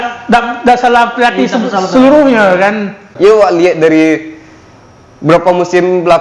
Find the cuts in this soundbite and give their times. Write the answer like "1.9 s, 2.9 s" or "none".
3.1 s